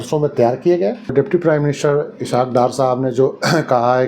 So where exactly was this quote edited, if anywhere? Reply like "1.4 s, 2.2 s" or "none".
1.1 s